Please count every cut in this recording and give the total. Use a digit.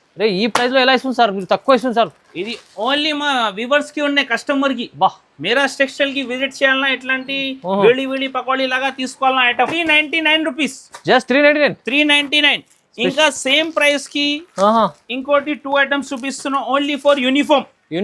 1